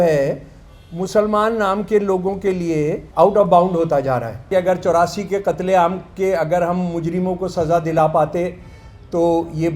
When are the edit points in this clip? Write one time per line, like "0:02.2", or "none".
0:03.0
0:04.5